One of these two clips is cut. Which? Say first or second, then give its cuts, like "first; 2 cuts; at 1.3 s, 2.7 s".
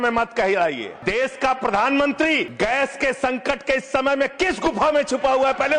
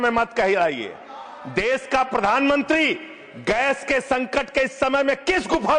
first; 2 cuts; at 0.9 s, 2.5 s